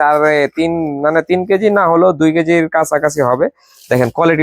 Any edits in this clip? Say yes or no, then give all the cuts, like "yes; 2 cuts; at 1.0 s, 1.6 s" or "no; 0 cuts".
no; 0 cuts